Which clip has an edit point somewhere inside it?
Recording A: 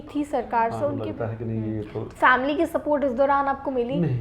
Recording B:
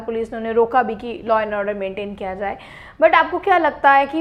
A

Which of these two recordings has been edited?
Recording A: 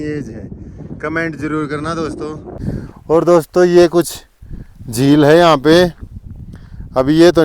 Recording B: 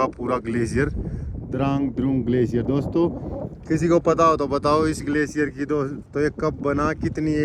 A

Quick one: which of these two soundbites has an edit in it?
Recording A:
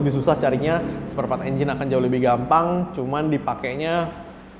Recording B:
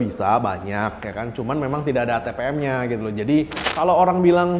B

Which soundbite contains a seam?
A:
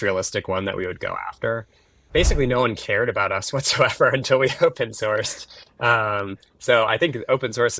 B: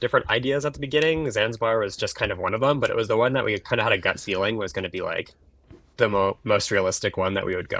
A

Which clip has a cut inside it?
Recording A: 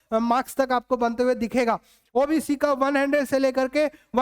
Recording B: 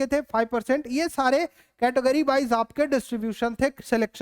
A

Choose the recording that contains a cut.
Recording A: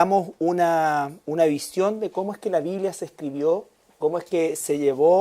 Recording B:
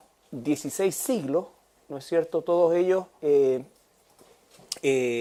A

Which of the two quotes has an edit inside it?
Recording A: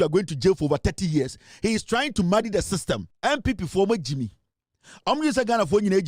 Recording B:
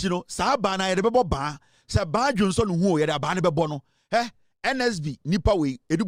A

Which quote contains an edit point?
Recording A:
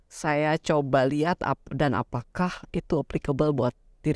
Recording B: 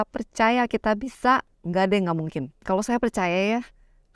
B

